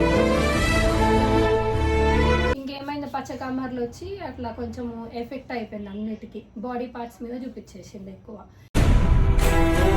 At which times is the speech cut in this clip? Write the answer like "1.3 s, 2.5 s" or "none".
2.5 s